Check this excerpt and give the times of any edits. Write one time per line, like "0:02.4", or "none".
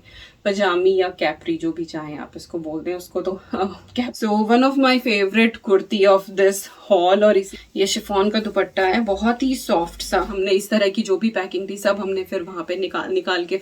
0:04.1
0:07.5
0:10.3